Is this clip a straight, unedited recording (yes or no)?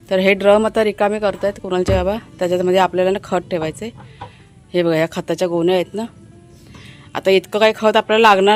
yes